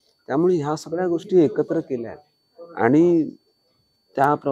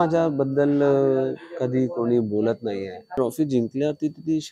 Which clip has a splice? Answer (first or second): second